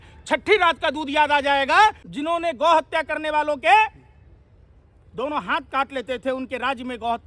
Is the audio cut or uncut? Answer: cut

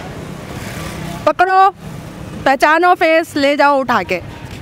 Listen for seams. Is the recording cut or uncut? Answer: uncut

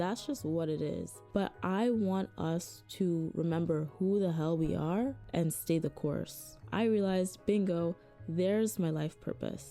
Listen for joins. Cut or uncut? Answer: cut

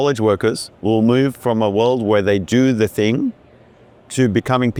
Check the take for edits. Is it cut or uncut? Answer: uncut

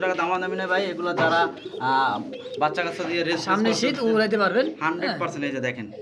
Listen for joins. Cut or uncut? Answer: uncut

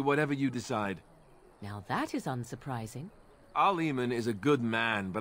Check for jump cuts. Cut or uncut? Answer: uncut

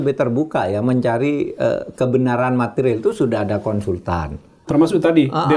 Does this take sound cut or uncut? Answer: cut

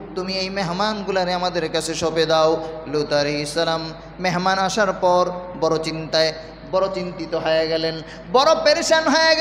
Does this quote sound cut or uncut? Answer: uncut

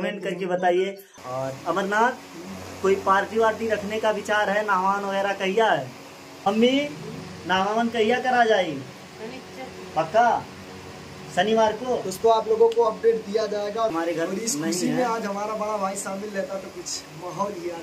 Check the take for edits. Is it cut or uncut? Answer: cut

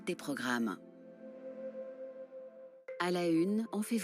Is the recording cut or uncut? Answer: cut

